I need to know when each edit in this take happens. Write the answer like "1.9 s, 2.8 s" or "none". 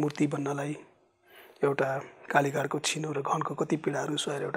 none